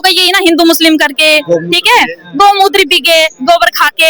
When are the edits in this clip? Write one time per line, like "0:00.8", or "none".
none